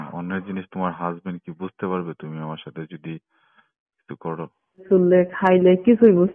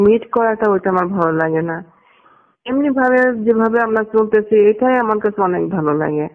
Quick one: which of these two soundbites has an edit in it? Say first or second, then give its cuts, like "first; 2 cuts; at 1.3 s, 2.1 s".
first; 1 cut; at 4.8 s